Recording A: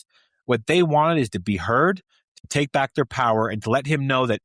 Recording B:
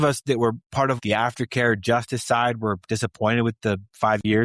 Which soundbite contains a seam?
B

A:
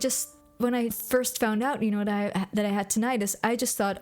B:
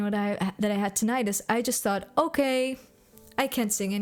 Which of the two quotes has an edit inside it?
A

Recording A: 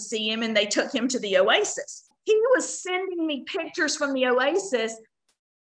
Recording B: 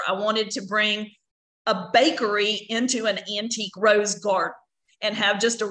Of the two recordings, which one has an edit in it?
A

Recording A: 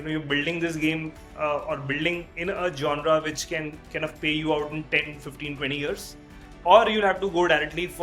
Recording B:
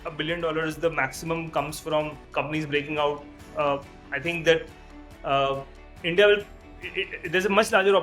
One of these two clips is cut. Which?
B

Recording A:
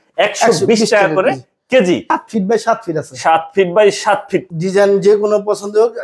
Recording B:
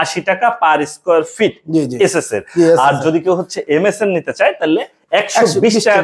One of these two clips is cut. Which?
A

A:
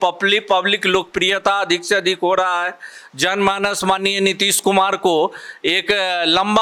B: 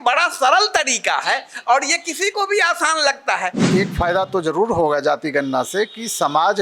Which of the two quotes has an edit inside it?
B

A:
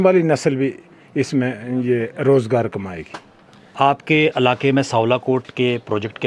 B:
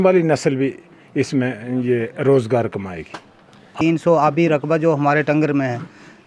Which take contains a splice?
B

